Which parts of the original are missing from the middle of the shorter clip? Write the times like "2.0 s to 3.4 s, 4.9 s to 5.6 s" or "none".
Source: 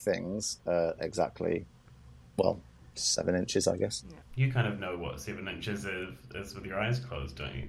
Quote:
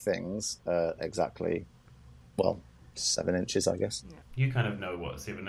none